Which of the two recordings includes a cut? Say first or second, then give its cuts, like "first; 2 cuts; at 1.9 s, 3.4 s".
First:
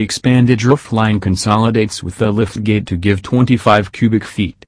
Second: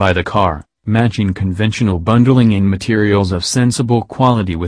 first; 1 cut; at 1.8 s